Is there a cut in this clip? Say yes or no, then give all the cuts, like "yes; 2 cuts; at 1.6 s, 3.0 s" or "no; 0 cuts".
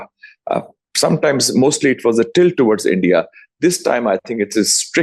no; 0 cuts